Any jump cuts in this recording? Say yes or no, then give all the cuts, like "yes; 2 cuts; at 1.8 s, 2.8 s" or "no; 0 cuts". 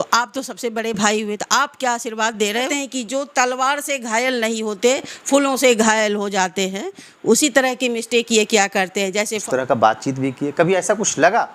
yes; 2 cuts; at 2.7 s, 9.4 s